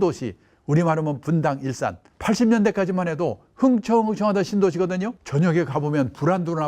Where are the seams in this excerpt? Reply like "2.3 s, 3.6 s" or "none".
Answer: 2.1 s, 5.2 s